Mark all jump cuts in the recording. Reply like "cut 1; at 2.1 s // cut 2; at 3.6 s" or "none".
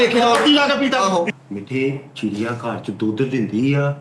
cut 1; at 1.3 s

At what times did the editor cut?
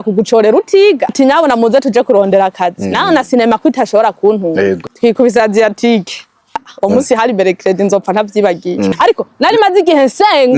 cut 1; at 1.1 s // cut 2; at 4.8 s // cut 3; at 6.7 s // cut 4; at 8.9 s

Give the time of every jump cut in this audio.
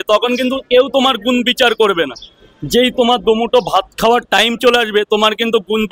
none

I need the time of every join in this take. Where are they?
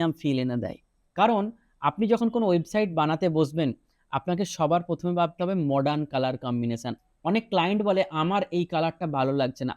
cut 1; at 1.0 s // cut 2; at 6.9 s

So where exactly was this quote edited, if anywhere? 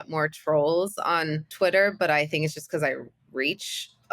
cut 1; at 1.4 s

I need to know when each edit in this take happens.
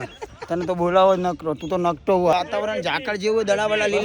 cut 1; at 2.3 s

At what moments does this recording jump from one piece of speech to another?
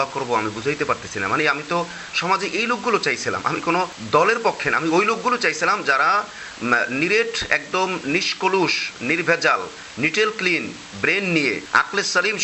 none

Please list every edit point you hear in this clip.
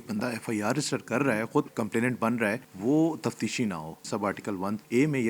cut 1; at 1.7 s // cut 2; at 2.7 s // cut 3; at 4.3 s

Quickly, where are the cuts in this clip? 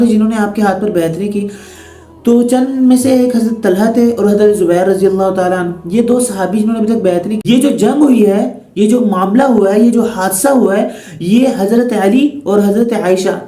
cut 1; at 7.4 s

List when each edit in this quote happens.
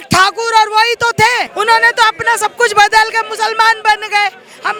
none

